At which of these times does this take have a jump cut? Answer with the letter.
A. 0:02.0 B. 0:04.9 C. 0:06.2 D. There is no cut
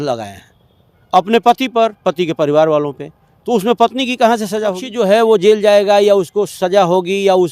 B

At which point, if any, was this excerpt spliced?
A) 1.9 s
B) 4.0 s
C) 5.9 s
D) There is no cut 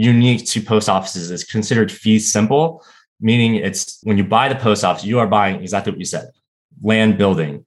B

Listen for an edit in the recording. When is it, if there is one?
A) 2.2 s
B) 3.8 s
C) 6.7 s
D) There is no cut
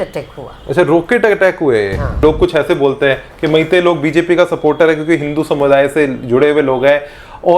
A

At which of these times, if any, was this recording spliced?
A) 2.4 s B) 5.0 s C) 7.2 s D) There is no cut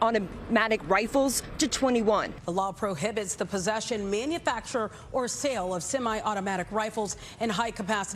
A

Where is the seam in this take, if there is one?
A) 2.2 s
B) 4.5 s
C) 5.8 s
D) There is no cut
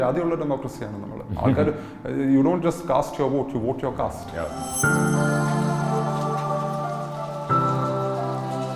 B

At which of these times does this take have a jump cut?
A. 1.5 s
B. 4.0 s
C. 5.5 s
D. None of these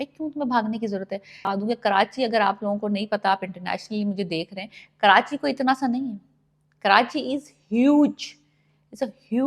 A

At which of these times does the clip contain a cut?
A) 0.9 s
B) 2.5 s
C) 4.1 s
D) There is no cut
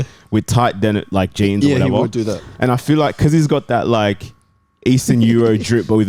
D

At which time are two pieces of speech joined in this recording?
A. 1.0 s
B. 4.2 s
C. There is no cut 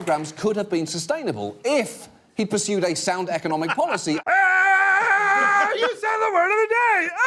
B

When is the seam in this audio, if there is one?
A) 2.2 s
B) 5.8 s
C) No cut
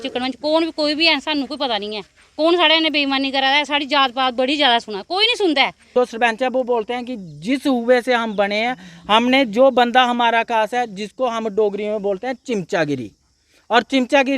B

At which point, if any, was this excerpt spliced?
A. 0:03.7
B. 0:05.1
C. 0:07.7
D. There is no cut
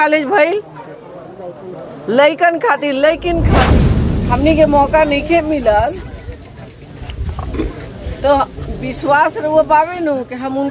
A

